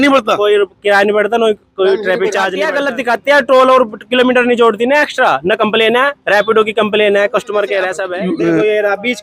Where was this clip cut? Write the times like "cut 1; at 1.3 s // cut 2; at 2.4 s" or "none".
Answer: cut 1; at 2.6 s // cut 2; at 8.0 s

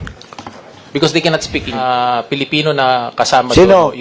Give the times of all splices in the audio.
cut 1; at 1.8 s

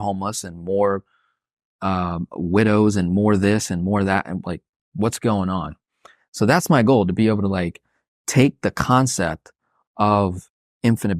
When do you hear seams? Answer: none

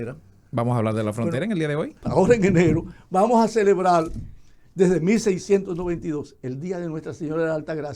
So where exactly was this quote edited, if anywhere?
cut 1; at 2.0 s

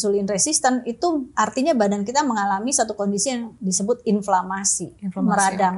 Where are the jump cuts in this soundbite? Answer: cut 1; at 3.5 s

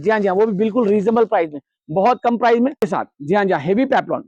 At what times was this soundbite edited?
cut 1; at 2.8 s

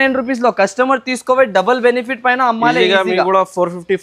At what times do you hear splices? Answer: none

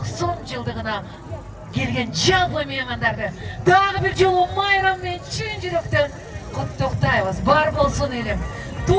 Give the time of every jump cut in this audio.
none

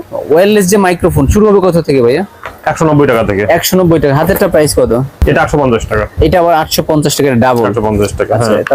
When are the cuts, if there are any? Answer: none

